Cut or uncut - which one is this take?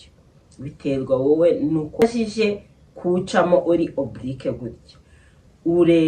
cut